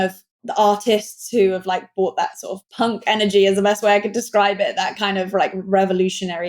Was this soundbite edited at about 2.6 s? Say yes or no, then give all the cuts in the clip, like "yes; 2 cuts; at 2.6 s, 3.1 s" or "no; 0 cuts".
yes; 1 cut; at 2.6 s